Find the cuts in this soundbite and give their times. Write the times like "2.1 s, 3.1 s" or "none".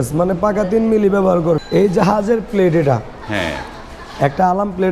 1.6 s